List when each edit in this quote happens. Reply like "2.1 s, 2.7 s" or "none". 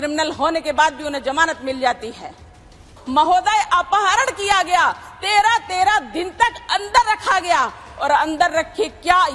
2.9 s

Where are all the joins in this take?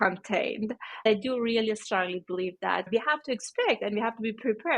1.1 s, 2.9 s

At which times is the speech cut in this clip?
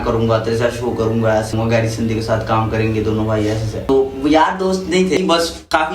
1.5 s, 3.9 s, 5.2 s

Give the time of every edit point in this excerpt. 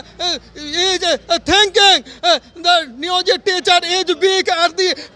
none

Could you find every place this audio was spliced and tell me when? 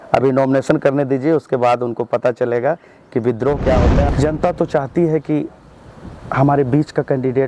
4.1 s

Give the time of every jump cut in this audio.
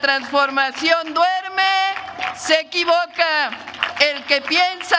none

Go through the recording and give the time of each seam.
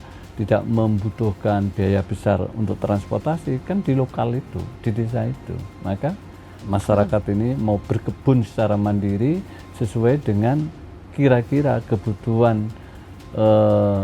6.6 s

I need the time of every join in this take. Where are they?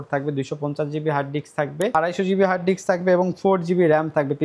1.9 s

